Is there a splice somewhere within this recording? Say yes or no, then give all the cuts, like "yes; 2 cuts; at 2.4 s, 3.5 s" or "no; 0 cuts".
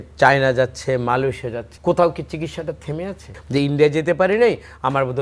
yes; 2 cuts; at 1.7 s, 3.3 s